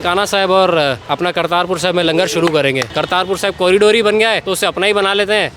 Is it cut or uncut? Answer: cut